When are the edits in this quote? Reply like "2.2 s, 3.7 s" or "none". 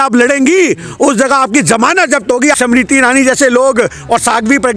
2.5 s